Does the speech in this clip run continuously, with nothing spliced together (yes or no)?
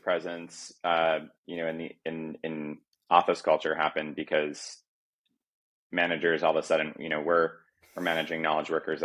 yes